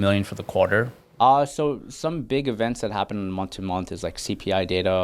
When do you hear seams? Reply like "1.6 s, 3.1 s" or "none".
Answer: 1.0 s